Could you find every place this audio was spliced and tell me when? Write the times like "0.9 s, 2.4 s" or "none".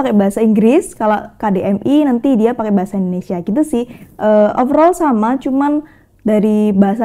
none